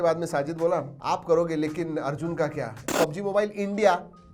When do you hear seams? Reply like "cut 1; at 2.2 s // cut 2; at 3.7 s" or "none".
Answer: cut 1; at 0.9 s // cut 2; at 2.9 s